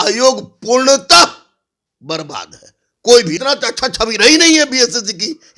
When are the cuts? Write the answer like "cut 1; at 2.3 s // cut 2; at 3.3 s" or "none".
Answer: cut 1; at 3.3 s